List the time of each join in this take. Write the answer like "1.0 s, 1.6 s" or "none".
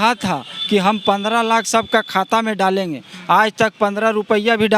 none